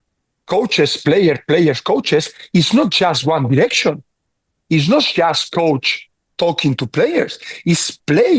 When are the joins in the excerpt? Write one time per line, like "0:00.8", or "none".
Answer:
none